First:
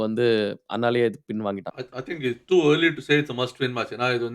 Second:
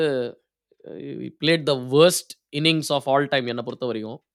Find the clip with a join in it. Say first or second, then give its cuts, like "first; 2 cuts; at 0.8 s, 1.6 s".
first; 1 cut; at 1.8 s